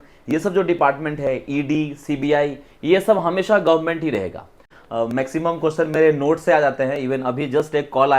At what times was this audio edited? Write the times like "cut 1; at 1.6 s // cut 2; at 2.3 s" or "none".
cut 1; at 4.7 s